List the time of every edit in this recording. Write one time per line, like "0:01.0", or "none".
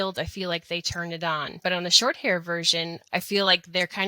0:01.6
0:03.0